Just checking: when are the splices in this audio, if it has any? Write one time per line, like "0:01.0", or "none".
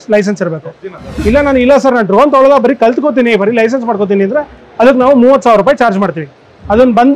0:01.1